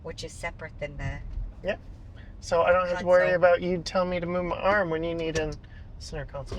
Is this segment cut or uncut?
uncut